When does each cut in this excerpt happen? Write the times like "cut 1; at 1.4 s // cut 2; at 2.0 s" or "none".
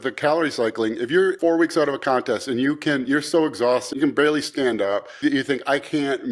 cut 1; at 1.4 s // cut 2; at 3.9 s // cut 3; at 5.2 s